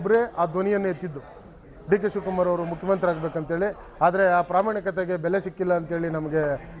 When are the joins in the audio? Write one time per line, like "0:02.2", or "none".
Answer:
none